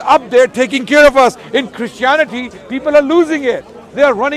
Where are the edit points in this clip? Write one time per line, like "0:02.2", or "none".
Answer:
none